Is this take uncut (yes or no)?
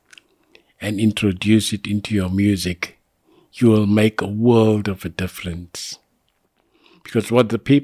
yes